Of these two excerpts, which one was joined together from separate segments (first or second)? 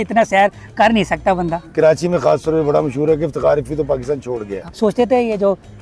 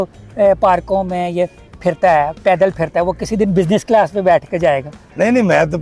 first